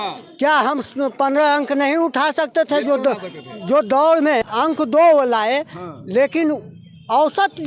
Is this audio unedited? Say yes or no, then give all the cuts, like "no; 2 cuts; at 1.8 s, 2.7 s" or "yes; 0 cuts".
no; 1 cut; at 4.4 s